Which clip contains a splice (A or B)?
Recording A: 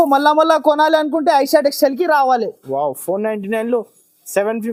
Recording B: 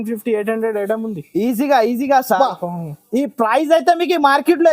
B